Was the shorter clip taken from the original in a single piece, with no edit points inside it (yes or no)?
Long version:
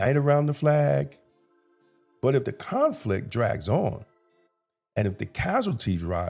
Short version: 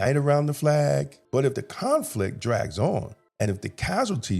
no